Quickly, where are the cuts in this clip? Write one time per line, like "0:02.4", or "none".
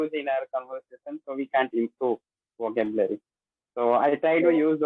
none